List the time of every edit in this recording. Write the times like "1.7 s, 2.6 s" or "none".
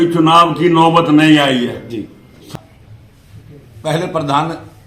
2.5 s